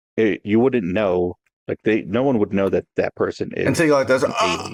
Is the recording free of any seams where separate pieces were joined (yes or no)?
yes